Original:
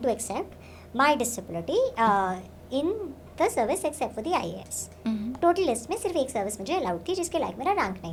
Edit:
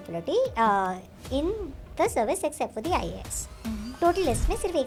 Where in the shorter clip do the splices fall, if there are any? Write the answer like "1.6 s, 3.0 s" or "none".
none